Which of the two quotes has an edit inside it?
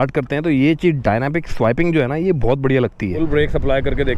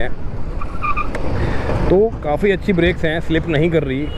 first; 1 cut; at 3.2 s

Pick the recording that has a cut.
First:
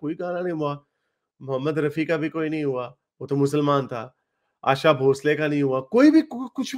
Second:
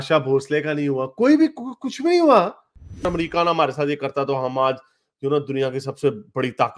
second; 1 cut; at 3.0 s

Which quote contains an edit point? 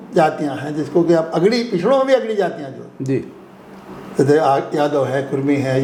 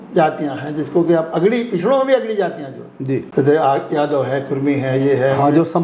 second; 1 cut; at 3.3 s

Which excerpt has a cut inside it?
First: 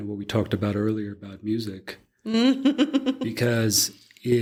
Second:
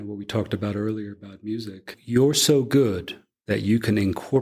second; 1 cut; at 1.9 s

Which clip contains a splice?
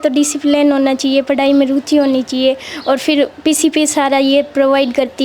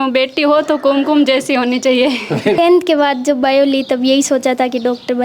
second; 1 cut; at 2.6 s

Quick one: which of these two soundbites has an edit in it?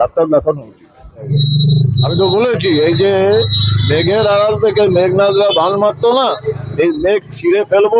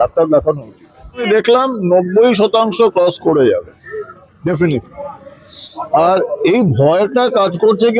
first; 1 cut; at 1.2 s

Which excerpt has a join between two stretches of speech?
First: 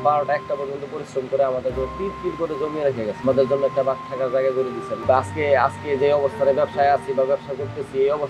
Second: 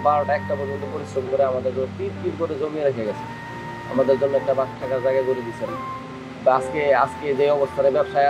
first; 2 cuts; at 3.2 s, 4.9 s

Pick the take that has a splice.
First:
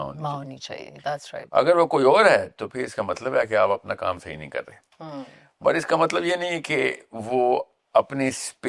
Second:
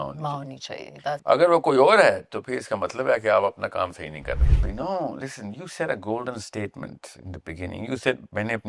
second; 2 cuts; at 1.2 s, 4.7 s

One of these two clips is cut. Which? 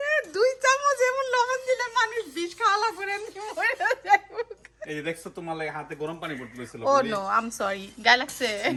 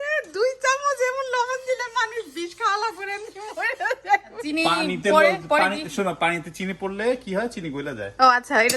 second; 1 cut; at 4.4 s

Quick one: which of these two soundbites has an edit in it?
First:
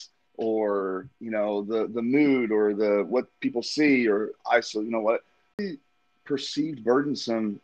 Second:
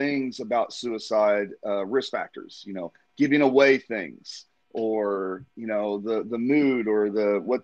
first; 1 cut; at 5.6 s

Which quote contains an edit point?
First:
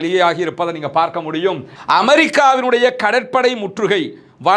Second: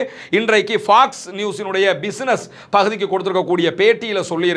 first; 1 cut; at 1.7 s

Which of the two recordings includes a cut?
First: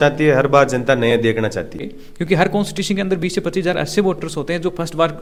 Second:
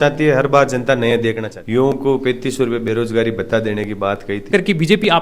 second; 2 cuts; at 1.5 s, 4.5 s

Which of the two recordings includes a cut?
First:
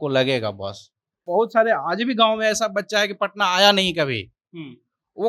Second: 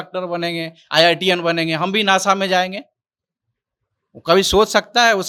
first; 1 cut; at 1.2 s

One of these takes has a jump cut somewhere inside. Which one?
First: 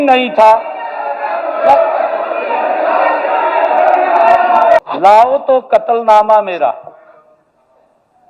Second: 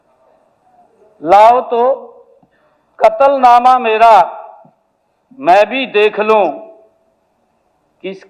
first; 1 cut; at 4.8 s

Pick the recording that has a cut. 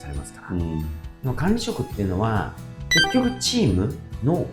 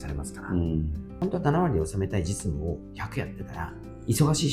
first; 1 cut; at 1.0 s

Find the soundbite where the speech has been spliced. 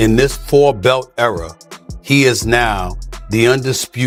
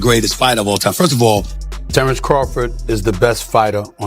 second; 1 cut; at 1.6 s

